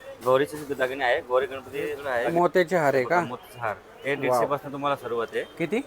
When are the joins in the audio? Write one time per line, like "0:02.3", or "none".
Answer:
0:02.0